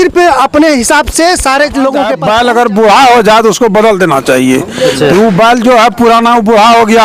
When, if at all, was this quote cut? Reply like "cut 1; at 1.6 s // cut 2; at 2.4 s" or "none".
cut 1; at 2.2 s